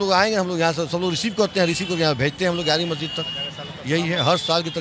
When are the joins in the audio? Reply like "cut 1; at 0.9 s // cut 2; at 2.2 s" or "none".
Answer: none